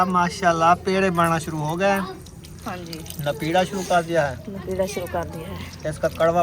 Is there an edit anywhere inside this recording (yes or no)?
no